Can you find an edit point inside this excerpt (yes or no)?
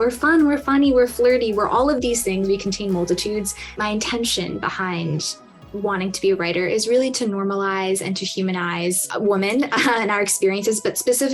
yes